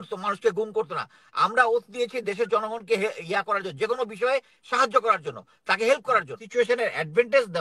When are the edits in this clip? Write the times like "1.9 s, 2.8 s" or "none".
6.4 s